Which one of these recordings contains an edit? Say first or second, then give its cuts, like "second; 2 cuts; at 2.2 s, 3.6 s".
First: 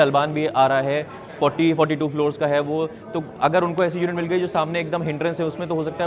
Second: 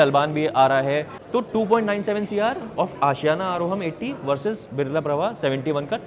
second; 1 cut; at 1.2 s